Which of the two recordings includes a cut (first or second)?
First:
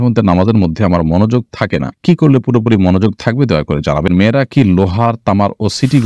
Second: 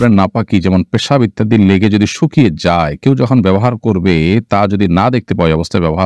first